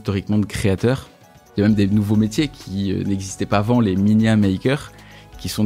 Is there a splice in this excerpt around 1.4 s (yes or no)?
yes